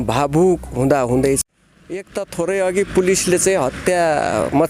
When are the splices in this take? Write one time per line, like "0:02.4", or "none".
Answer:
0:01.4